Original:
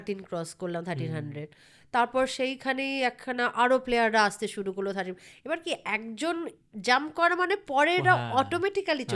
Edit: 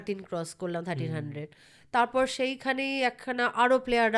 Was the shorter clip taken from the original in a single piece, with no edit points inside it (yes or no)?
yes